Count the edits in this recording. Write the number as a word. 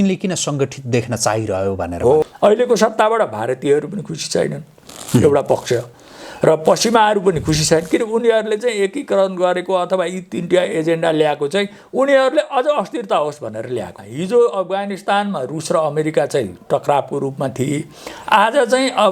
two